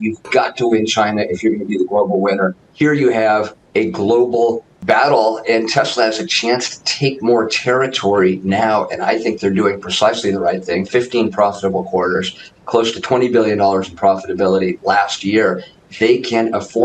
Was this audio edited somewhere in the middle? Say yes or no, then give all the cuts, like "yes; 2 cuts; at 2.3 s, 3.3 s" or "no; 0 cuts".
yes; 1 cut; at 2.6 s